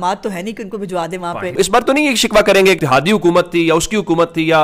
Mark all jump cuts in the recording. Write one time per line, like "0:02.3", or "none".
0:01.6
0:02.8

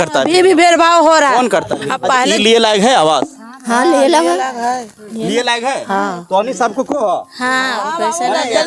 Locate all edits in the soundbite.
0:02.3

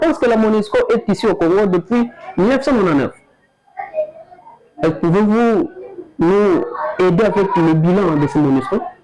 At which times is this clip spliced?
none

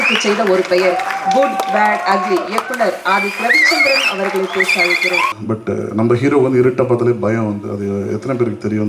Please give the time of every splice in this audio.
0:05.3

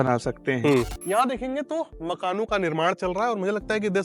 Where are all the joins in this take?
0:01.0

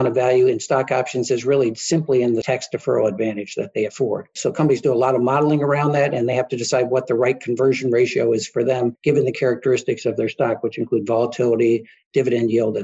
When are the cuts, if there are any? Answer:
0:02.4
0:04.3
0:09.0

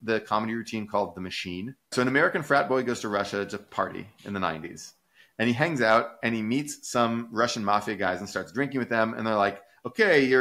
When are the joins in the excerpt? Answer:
0:01.9

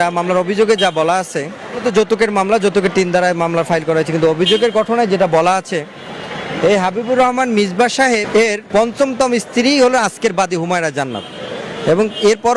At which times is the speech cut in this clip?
none

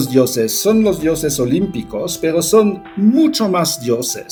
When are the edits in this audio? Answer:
none

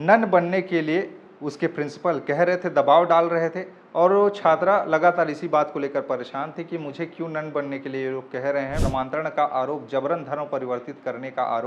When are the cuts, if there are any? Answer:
0:08.8

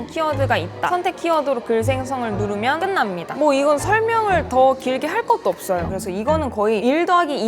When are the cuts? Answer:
0:00.9
0:05.9

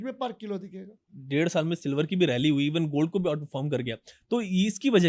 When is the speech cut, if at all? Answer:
0:01.1

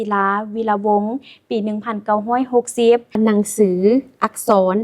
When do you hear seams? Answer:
0:03.2

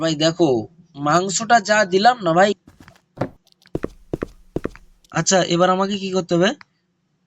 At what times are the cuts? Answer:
0:02.5

